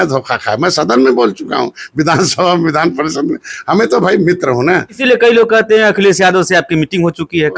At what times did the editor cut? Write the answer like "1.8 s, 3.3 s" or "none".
5.0 s